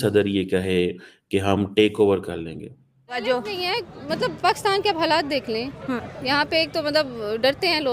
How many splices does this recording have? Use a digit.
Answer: 1